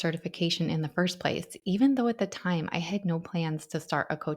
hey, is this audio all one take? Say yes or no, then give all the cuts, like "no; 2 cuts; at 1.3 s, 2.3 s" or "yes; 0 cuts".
yes; 0 cuts